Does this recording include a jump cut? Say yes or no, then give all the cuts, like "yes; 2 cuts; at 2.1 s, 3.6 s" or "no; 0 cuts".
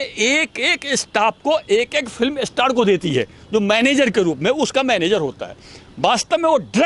no; 0 cuts